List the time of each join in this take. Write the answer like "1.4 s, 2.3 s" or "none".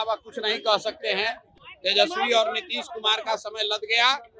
1.4 s